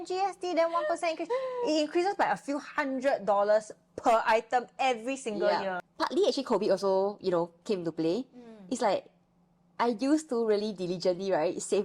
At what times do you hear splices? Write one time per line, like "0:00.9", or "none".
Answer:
0:05.8